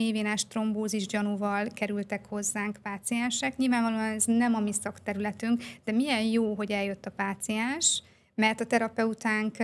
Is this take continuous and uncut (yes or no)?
yes